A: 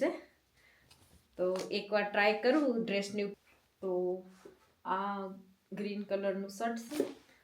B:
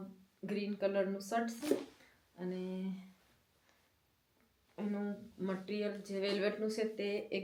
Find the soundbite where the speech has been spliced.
A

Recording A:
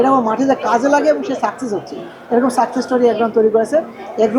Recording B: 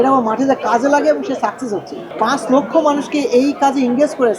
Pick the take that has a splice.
B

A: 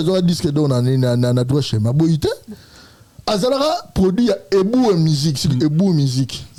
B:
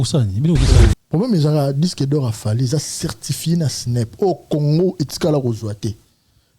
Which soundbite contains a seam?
B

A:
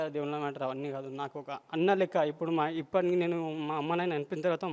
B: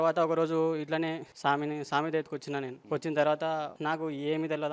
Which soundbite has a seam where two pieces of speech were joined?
B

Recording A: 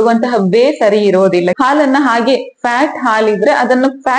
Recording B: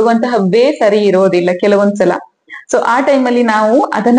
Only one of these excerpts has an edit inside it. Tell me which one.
A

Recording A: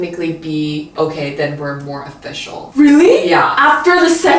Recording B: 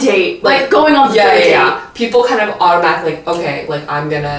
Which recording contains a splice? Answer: A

